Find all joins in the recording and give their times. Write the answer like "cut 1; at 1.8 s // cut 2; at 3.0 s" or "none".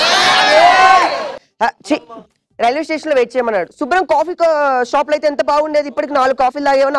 none